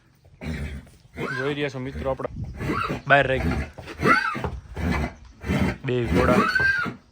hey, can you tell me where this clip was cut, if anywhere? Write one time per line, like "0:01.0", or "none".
0:02.3